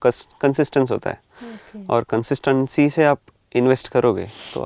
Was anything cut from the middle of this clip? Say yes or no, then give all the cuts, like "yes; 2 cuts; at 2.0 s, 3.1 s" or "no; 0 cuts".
no; 0 cuts